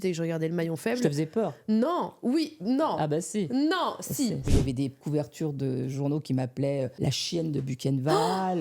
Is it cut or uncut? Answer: cut